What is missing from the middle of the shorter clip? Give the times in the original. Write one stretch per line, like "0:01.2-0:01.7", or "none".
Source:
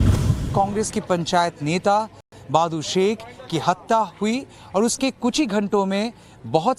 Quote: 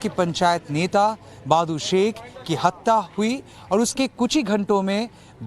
0:02.2-0:02.3